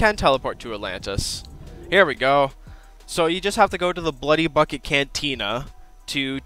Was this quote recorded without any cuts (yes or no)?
yes